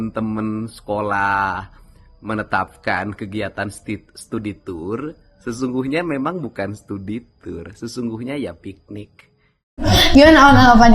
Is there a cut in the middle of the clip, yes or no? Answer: yes